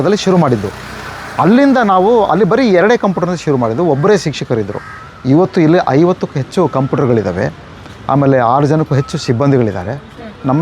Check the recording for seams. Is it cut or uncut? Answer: uncut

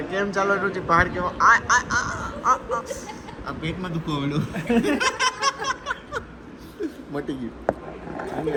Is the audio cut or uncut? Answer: uncut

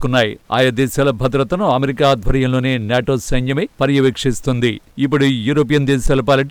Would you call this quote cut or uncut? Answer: uncut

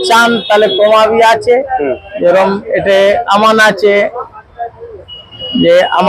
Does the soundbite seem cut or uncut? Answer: uncut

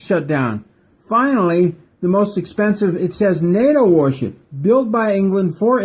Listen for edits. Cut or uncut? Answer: cut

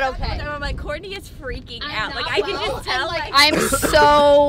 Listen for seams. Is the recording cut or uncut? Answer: uncut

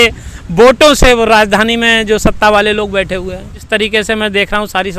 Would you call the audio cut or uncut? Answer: cut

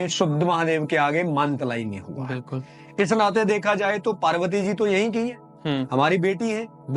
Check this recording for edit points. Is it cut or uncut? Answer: uncut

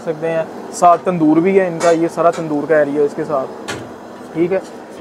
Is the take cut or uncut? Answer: uncut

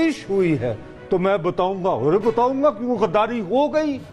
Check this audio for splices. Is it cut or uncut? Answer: uncut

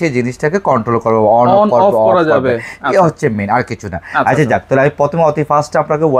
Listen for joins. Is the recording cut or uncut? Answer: uncut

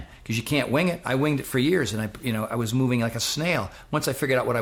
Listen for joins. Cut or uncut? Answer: uncut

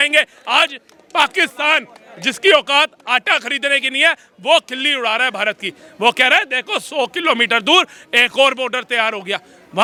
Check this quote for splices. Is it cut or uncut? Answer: uncut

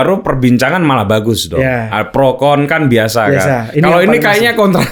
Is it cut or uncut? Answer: uncut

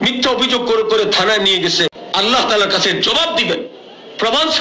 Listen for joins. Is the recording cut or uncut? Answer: cut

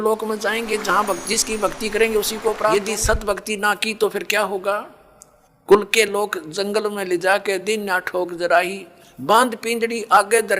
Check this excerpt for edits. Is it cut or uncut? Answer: cut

